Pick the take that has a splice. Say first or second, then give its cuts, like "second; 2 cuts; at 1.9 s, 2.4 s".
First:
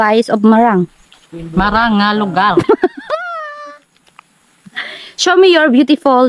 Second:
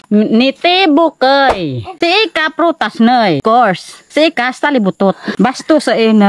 second; 3 cuts; at 1.5 s, 3.4 s, 5.3 s